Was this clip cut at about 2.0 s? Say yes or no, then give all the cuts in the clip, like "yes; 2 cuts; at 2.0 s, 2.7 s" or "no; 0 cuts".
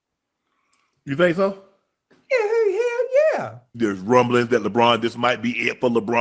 no; 1 cut; at 3.7 s